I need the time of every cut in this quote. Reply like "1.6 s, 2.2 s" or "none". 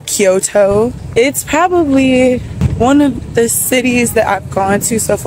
1.0 s, 2.6 s